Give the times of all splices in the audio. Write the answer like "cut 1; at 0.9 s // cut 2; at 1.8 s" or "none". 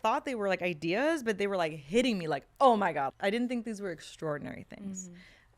cut 1; at 3.1 s